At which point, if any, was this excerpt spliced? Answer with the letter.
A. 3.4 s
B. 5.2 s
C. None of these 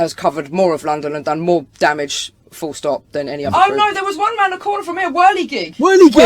A